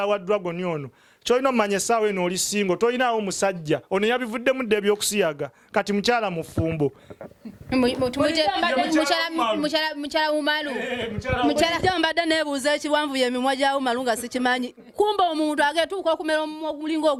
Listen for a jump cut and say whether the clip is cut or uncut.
uncut